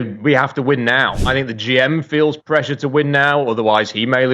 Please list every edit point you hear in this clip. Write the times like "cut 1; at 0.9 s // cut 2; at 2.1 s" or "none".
cut 1; at 1.2 s